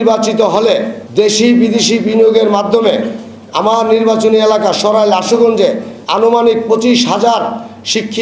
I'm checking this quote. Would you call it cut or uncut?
cut